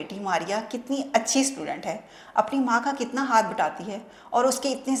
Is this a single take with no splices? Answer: yes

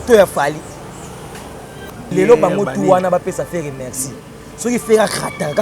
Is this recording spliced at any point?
yes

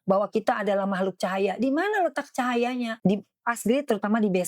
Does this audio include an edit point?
yes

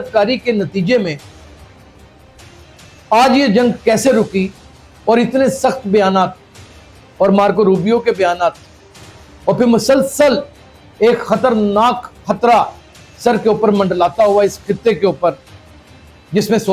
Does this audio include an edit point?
no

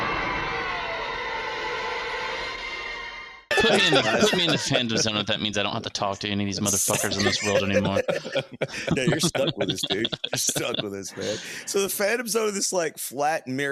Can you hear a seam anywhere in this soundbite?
no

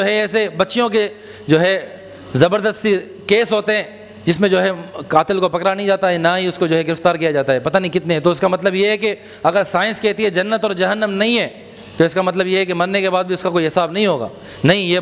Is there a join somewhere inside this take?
no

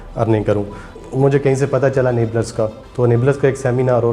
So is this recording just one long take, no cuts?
no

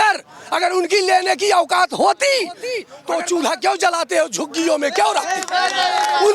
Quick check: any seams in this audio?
yes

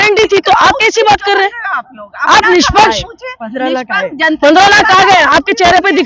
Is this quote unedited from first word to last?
yes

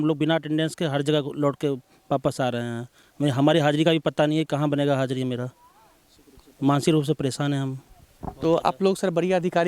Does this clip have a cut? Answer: no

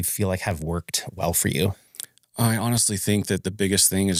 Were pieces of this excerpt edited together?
no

